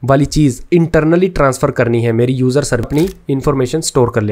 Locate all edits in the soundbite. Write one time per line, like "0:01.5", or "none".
0:02.9